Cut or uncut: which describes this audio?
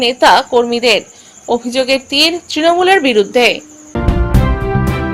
cut